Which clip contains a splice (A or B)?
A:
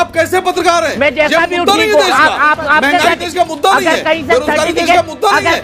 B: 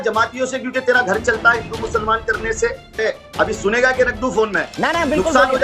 B